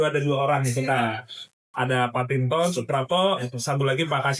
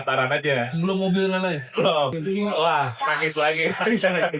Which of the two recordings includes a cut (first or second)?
second